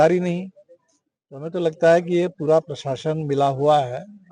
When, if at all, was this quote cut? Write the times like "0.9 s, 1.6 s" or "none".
none